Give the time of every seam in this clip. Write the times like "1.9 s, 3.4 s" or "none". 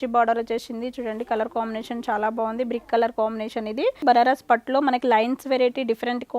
4.0 s